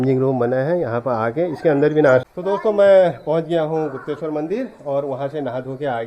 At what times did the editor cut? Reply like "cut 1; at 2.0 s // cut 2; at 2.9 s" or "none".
cut 1; at 2.3 s